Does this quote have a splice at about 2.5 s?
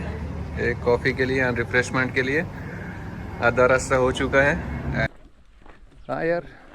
no; 1 cut; at 5.1 s

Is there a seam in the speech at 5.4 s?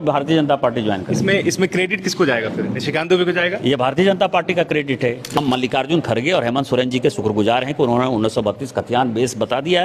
yes; 1 cut; at 5.4 s

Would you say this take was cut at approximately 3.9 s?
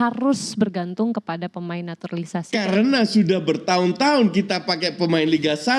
no; 0 cuts

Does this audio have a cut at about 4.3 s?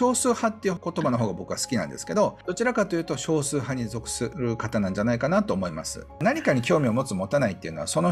yes; 4 cuts; at 0.8 s, 2.4 s, 4.3 s, 6.2 s

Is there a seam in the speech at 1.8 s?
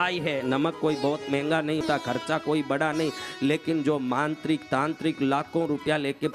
yes; 1 cut; at 1.8 s

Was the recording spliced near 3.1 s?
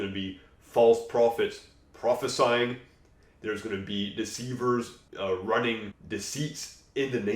no; 2 cuts; at 5.0 s, 5.9 s

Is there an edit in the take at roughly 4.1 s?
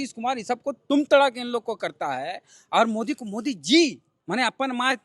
yes; 1 cut; at 4.1 s

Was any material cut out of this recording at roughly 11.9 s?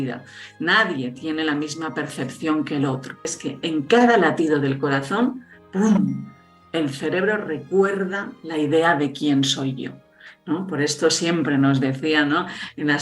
no; 1 cut; at 3.3 s

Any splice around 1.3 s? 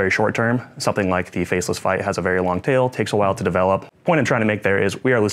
no; 1 cut; at 3.9 s

